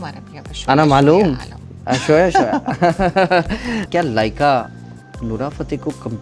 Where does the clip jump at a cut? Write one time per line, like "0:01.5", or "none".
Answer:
0:03.8